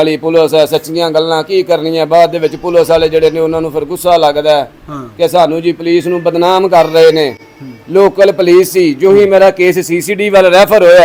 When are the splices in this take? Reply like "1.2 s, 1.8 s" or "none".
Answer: none